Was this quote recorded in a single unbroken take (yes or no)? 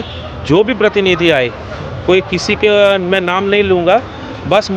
yes